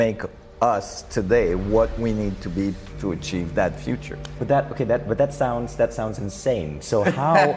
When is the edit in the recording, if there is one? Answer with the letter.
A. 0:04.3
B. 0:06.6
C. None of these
A